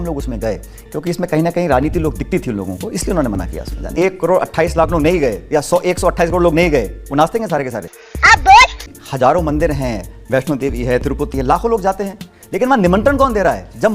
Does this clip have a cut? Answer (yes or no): yes